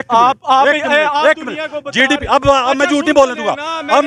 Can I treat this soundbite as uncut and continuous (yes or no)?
yes